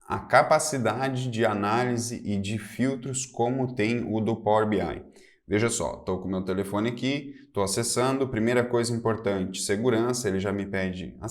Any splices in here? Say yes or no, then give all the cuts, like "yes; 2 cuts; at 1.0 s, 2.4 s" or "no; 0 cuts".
no; 0 cuts